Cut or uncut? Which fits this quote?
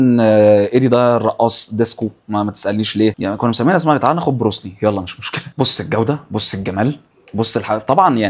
uncut